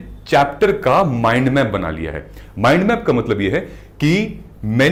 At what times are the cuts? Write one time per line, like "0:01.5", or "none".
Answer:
none